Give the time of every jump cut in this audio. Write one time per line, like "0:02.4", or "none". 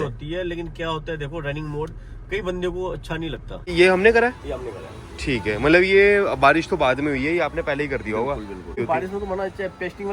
0:03.7
0:08.8